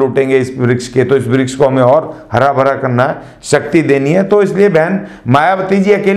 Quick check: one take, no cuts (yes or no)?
yes